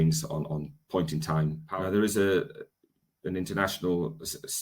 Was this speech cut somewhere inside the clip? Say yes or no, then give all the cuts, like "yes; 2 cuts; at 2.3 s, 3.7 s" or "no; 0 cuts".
yes; 1 cut; at 1.6 s